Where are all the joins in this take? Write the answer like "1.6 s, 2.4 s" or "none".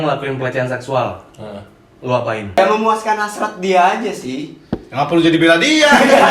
2.6 s